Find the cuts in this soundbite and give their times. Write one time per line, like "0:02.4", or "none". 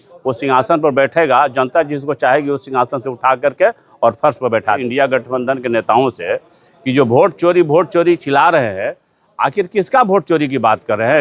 0:04.8